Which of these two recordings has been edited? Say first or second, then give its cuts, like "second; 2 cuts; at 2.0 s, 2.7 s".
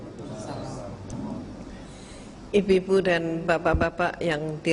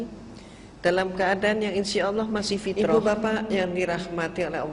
second; 1 cut; at 2.8 s